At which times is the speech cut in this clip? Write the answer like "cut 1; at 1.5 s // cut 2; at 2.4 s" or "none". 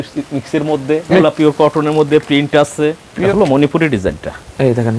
cut 1; at 1.2 s // cut 2; at 3.1 s